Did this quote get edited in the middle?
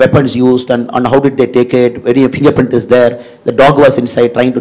no; 0 cuts

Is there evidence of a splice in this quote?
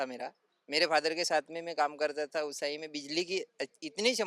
no; 0 cuts

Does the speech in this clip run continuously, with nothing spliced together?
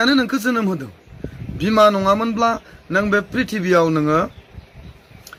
yes; 0 cuts

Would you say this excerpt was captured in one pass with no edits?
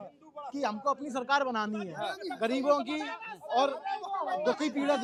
yes; 0 cuts

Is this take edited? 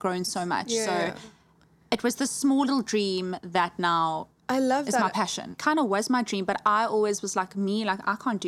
yes; 1 cut; at 5.5 s

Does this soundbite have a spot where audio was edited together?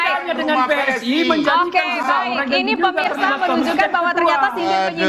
no; 0 cuts

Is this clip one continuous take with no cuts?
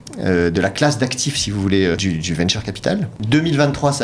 no; 2 cuts; at 2.0 s, 3.2 s

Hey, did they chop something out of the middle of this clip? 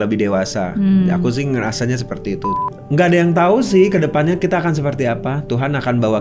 yes; 1 cut; at 2.5 s

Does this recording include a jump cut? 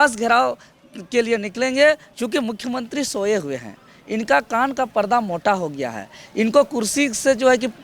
no; 0 cuts

